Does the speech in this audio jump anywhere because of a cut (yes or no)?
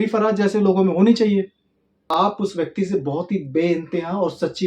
yes